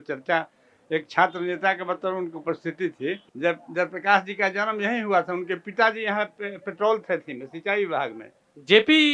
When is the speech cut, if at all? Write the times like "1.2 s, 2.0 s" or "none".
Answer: 3.3 s